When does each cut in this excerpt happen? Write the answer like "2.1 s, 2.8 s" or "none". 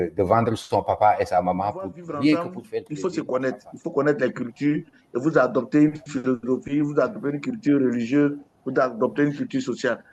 2.9 s